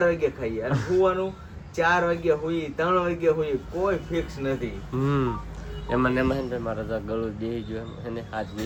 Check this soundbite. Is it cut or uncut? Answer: uncut